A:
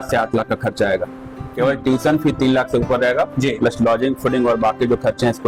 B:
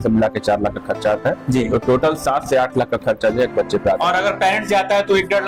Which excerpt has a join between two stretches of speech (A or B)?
A